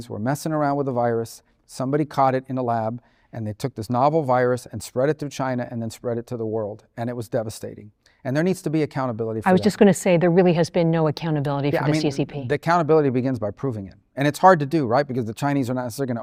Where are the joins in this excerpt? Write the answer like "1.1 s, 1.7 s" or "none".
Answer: none